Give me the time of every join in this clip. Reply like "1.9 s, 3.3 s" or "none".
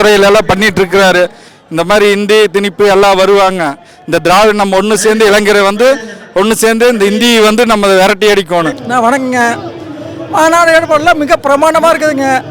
1.5 s, 8.8 s